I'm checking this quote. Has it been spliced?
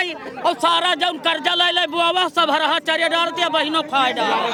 no; 0 cuts

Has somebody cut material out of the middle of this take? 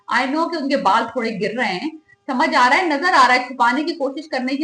no; 0 cuts

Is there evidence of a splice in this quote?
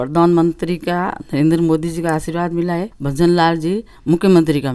no; 0 cuts

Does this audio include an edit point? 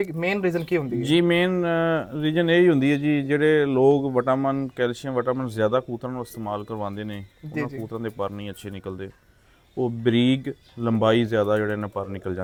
no; 0 cuts

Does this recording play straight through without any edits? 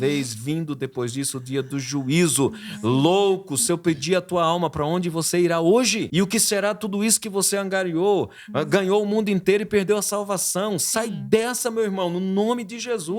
no; 1 cut; at 6.1 s

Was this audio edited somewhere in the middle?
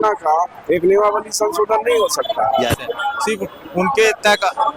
yes; 1 cut; at 3.0 s

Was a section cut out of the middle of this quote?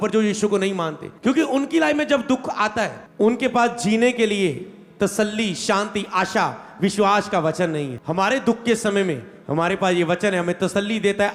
yes; 1 cut; at 3.0 s

